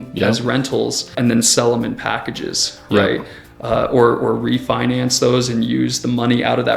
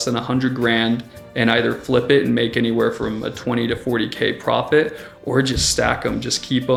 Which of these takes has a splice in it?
first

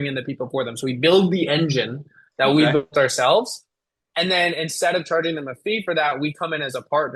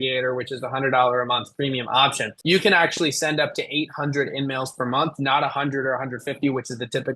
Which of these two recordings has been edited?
second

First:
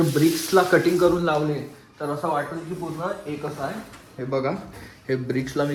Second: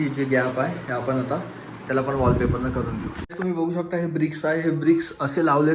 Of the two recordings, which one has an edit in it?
second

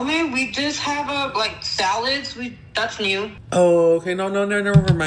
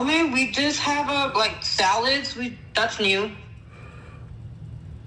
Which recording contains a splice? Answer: first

